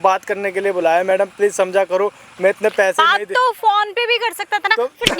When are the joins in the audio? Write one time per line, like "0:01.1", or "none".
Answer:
none